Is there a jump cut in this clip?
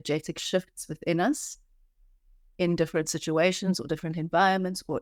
no; 0 cuts

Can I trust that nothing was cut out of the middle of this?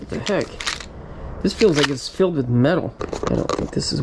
no; 1 cut; at 3.0 s

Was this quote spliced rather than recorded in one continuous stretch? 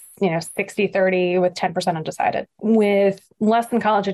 yes; 1 cut; at 2.5 s

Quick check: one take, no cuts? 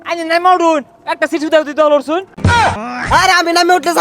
no; 1 cut; at 2.6 s

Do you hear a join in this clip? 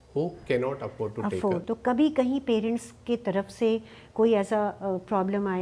yes; 1 cut; at 1.6 s

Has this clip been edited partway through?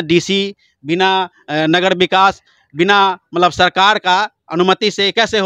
no; 0 cuts

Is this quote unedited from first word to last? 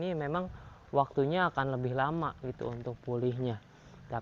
yes; 0 cuts

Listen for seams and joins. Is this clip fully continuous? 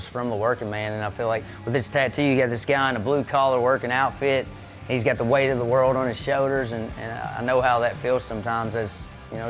no; 1 cut; at 1.5 s

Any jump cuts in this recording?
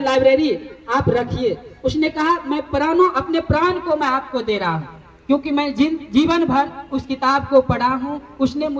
no; 0 cuts

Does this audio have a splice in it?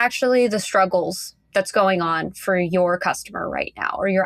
no; 0 cuts

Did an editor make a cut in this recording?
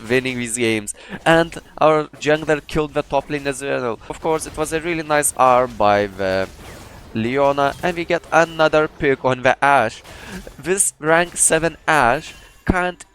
yes; 1 cut; at 4.2 s

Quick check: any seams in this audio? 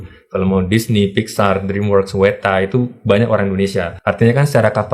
yes; 1 cut; at 3.9 s

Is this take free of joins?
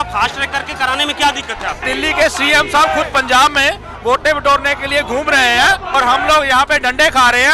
no; 2 cuts; at 1.8 s, 5.9 s

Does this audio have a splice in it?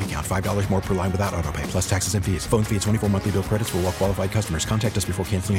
no; 0 cuts

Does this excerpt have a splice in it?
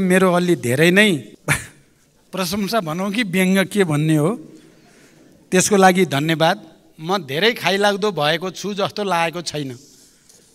yes; 1 cut; at 1.3 s

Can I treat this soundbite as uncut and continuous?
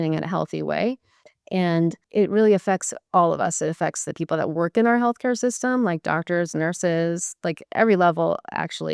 no; 1 cut; at 2.0 s

